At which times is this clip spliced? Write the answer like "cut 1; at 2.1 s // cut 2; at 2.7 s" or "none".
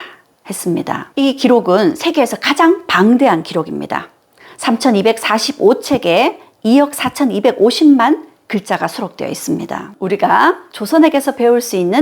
cut 1; at 1.1 s // cut 2; at 10.0 s